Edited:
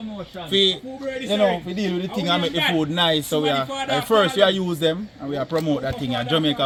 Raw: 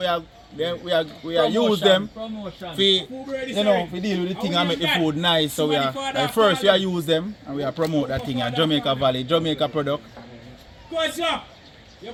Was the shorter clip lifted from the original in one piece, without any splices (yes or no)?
yes